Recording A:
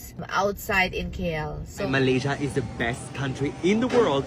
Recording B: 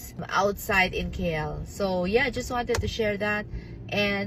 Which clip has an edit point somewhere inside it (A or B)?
A